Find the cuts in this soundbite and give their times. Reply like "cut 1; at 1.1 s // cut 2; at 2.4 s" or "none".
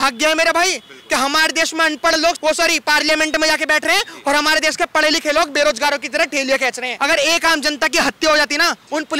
cut 1; at 2.4 s // cut 2; at 6.9 s